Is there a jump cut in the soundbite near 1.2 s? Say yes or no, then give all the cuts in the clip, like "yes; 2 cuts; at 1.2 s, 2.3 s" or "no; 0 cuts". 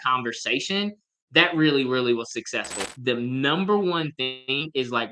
no; 1 cut; at 2.9 s